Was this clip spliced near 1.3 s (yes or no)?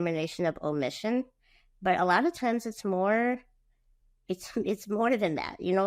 no